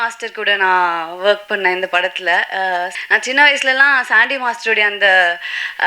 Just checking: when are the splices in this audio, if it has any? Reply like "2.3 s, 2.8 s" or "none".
2.9 s